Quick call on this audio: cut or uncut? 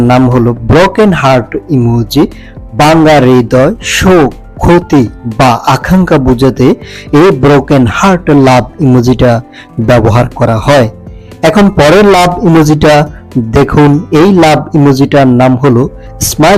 uncut